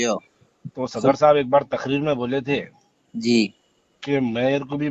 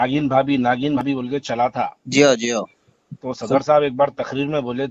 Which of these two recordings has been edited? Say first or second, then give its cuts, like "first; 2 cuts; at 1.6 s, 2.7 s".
second; 1 cut; at 1.0 s